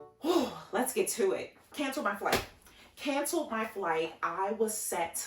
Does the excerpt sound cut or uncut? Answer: cut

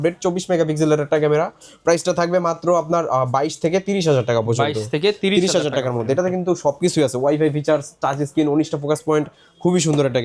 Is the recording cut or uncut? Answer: uncut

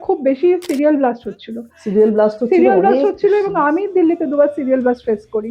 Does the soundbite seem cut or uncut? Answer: uncut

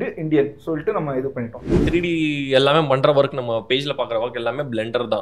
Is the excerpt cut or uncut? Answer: cut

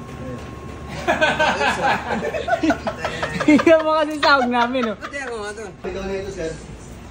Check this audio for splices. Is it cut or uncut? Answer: cut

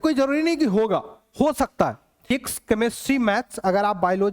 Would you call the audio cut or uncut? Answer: cut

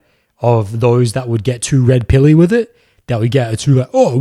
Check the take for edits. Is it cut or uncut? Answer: uncut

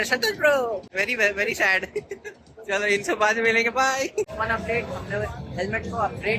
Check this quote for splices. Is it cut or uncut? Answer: cut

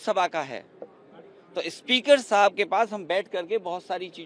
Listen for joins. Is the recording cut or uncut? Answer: uncut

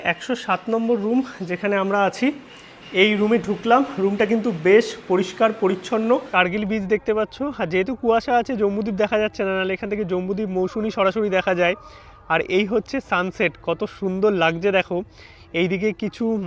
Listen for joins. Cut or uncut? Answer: cut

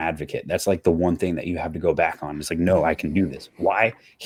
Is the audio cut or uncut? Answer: uncut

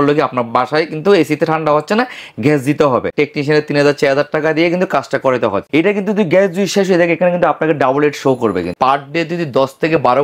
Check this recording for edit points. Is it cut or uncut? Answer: cut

